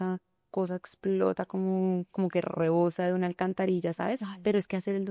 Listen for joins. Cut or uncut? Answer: uncut